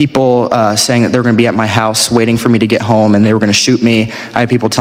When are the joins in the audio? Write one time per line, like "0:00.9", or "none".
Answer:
none